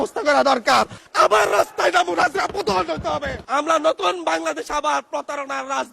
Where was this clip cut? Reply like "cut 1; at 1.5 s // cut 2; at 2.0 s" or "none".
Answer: cut 1; at 1.0 s // cut 2; at 3.4 s